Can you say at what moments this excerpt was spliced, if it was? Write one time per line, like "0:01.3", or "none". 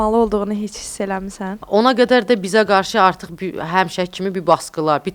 0:01.6